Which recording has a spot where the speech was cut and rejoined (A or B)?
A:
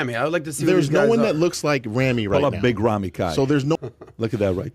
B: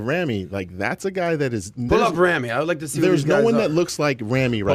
A